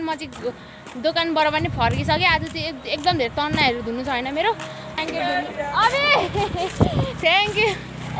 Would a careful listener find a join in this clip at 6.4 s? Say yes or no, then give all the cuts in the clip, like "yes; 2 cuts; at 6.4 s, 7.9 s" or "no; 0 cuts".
no; 1 cut; at 5.0 s